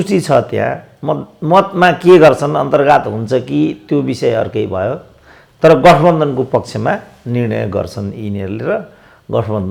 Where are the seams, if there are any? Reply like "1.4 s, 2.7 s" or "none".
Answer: none